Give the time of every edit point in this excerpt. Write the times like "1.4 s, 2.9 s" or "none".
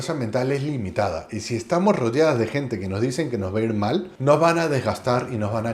4.1 s